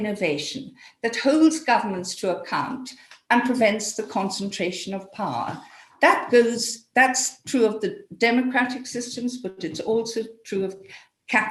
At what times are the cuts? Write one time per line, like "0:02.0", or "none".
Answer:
none